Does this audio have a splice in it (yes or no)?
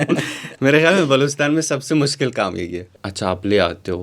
yes